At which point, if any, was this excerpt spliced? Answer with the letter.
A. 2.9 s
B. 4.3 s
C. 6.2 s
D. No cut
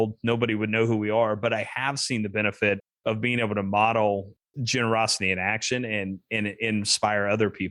B